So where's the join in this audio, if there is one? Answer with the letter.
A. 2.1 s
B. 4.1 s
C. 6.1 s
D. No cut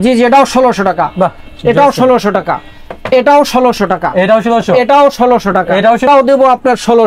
C